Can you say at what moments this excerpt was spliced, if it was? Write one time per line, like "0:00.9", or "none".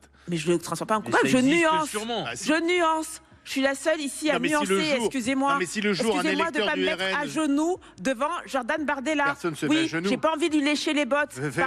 none